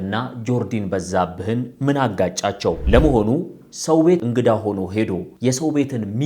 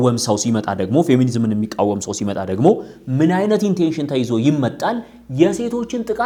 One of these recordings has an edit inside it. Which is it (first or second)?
first